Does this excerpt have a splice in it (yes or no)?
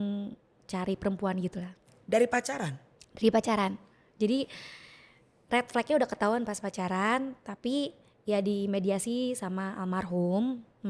no